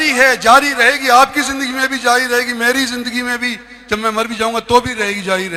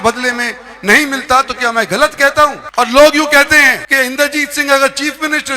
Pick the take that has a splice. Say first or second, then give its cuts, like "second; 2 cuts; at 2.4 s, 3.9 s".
second; 2 cuts; at 2.6 s, 3.8 s